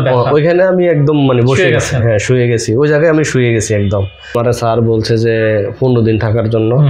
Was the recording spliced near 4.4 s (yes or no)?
yes